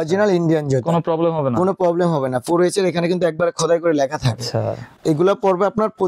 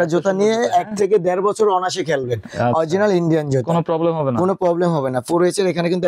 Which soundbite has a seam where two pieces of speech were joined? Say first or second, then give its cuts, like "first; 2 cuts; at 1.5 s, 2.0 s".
first; 1 cut; at 5.0 s